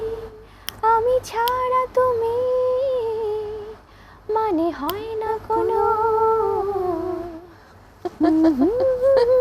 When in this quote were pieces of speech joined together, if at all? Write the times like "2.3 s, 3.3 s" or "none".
none